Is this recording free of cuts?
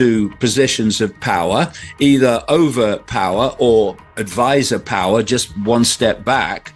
yes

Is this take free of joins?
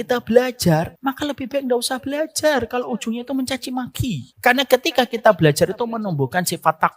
no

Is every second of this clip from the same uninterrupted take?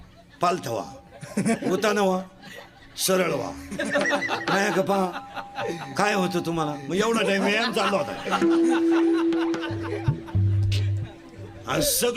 yes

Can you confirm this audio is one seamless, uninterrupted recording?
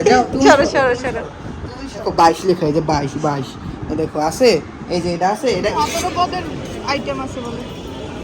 no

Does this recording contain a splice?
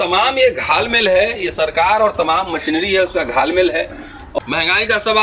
yes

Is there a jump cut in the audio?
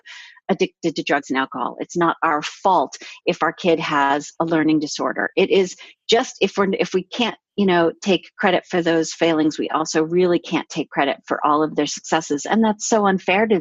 no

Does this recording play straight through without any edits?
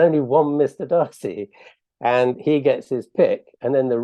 yes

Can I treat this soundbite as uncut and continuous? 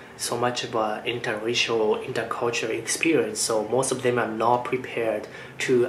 yes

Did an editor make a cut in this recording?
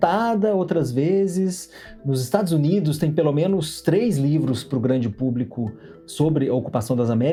no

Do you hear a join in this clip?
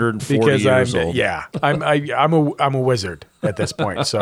yes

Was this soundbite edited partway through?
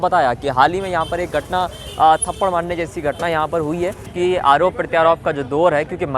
yes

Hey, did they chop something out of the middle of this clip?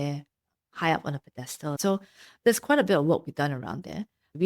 yes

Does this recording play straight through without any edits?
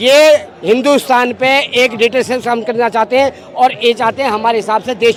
yes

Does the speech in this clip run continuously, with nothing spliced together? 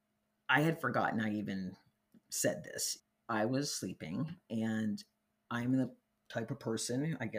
no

